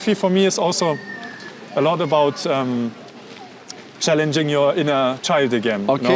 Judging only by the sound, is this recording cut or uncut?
uncut